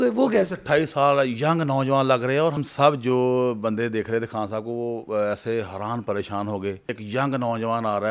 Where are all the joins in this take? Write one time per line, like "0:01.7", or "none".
0:02.6
0:07.0